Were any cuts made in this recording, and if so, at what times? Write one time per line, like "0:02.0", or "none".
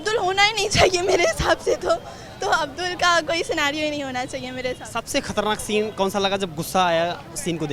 none